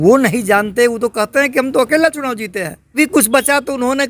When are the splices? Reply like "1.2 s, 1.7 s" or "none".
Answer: 2.9 s